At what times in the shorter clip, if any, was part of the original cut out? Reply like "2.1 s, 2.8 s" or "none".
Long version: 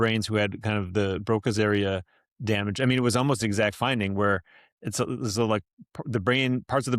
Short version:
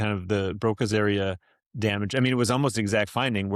none